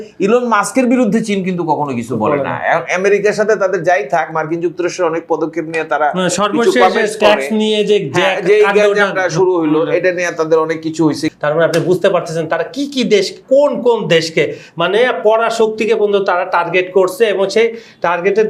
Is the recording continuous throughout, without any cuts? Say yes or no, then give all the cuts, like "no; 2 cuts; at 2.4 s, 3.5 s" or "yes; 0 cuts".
no; 1 cut; at 11.3 s